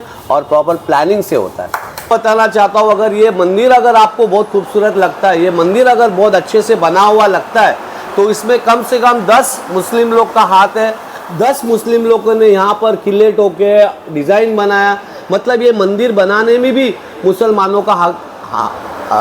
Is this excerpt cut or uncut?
cut